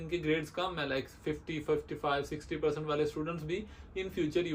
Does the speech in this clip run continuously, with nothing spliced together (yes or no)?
yes